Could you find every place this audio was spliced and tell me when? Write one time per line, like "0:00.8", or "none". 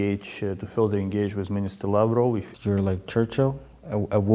0:02.5